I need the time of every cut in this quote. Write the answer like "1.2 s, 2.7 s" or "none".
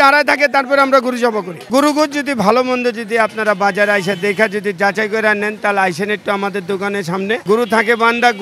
1.6 s, 7.4 s